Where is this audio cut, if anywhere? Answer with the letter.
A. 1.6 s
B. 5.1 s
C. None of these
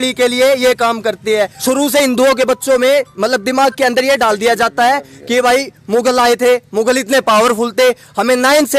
A